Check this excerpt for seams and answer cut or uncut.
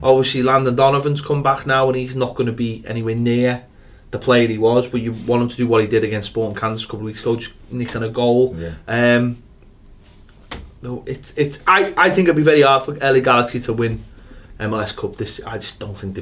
uncut